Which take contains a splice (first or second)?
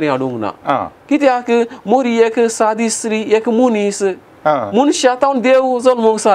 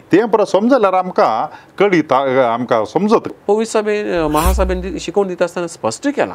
second